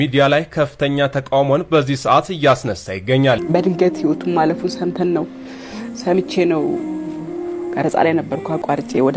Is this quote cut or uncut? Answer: cut